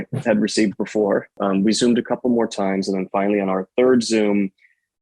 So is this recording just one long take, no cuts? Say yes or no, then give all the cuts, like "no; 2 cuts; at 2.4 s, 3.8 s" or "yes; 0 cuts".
no; 1 cut; at 1.4 s